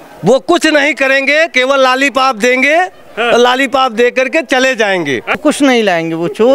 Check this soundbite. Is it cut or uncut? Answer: cut